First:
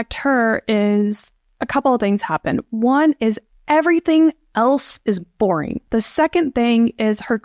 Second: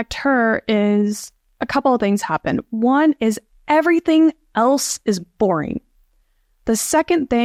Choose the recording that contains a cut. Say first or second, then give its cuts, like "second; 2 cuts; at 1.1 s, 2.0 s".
first; 1 cut; at 5.8 s